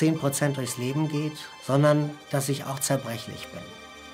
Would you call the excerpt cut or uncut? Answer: cut